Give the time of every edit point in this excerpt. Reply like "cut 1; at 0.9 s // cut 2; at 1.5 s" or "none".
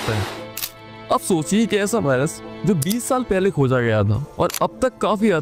none